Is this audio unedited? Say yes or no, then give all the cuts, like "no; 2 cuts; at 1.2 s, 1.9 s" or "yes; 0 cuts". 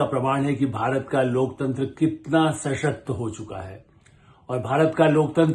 yes; 0 cuts